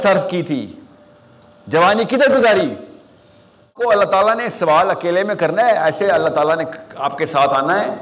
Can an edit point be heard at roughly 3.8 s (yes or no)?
yes